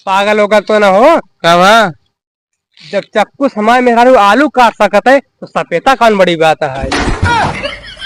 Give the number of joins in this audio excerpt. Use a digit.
1